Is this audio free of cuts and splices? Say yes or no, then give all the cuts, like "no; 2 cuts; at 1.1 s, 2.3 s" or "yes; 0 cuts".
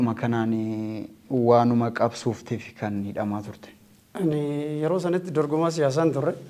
yes; 0 cuts